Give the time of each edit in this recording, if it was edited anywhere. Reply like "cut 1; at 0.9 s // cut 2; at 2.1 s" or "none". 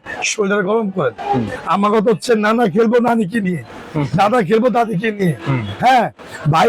cut 1; at 1.6 s